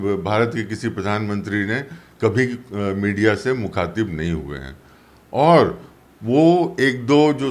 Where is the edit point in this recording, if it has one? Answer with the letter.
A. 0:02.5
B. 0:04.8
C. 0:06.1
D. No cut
D